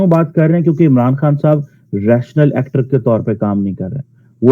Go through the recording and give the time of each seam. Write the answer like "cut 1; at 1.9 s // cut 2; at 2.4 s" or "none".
none